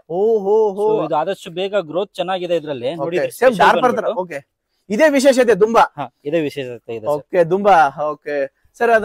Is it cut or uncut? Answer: uncut